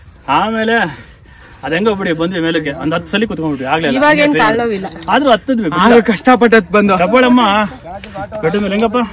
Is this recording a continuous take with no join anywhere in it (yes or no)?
yes